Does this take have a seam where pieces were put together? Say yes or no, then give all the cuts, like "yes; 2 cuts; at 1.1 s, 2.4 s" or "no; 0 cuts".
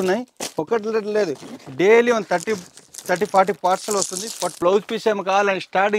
yes; 1 cut; at 4.6 s